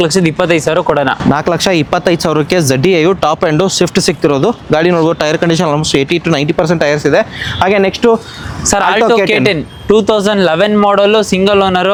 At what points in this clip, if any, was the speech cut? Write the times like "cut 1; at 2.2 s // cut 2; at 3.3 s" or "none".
none